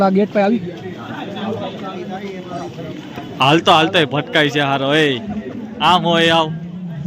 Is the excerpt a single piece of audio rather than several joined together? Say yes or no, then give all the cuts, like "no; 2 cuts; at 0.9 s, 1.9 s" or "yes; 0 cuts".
yes; 0 cuts